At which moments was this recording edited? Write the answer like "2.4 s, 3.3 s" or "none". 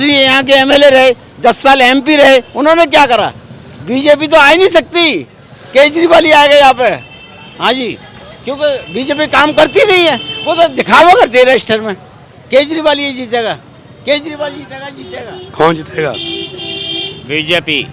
none